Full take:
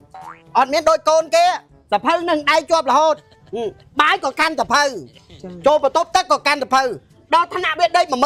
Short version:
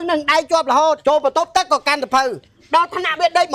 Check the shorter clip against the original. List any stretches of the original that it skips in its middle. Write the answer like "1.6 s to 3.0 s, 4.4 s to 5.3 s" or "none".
3.2 s to 5.6 s